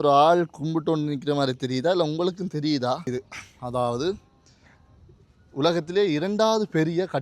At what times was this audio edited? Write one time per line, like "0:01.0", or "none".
0:03.1